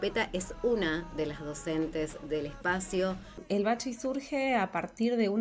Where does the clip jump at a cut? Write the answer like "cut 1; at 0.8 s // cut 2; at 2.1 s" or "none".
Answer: cut 1; at 3.4 s